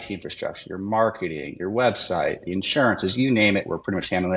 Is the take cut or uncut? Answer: uncut